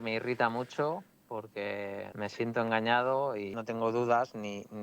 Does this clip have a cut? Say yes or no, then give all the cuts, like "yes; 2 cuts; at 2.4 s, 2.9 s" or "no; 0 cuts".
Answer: yes; 2 cuts; at 2.1 s, 3.5 s